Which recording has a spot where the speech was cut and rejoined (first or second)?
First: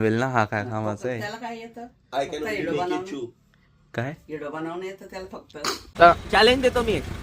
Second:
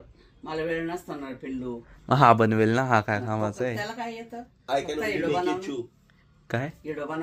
first